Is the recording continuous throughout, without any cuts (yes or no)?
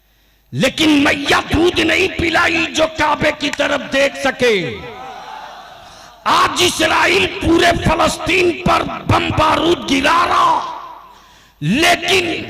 yes